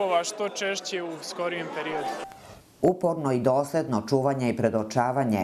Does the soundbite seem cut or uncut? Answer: cut